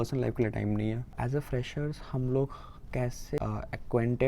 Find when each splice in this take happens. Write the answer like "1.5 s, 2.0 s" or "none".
1.1 s, 3.4 s